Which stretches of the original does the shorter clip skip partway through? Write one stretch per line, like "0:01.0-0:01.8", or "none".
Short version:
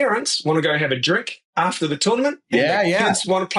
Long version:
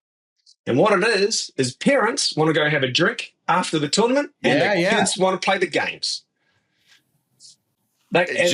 none